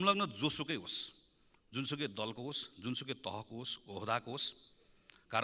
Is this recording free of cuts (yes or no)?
yes